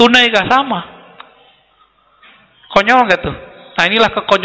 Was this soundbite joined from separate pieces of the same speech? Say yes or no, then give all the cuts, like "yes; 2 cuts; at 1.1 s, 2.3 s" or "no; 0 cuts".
no; 0 cuts